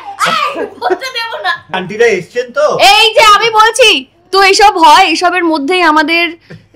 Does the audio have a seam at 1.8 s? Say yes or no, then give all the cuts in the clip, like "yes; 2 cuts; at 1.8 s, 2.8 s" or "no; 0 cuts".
yes; 1 cut; at 1.8 s